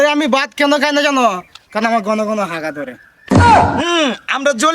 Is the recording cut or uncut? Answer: cut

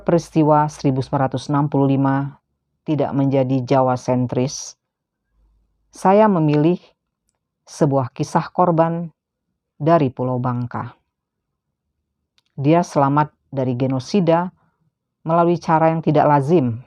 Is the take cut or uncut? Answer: uncut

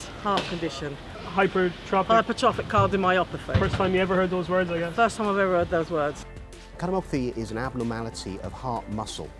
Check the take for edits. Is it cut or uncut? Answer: cut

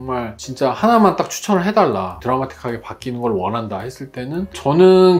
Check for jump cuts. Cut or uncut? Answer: cut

